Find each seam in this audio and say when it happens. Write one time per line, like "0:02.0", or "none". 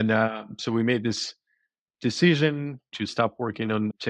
0:03.1